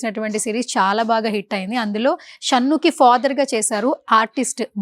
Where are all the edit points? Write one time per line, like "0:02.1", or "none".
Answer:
none

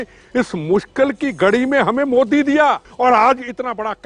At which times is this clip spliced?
0:02.9

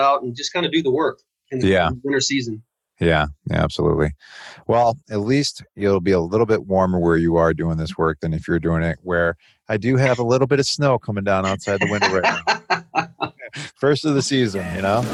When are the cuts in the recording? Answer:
none

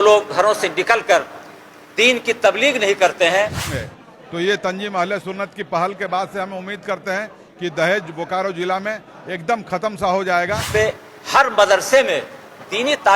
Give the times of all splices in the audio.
0:03.7
0:10.7

